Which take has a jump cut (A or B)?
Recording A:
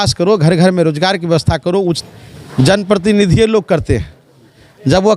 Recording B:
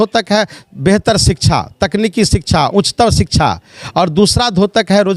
A